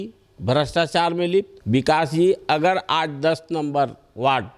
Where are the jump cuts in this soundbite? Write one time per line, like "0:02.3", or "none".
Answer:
0:01.6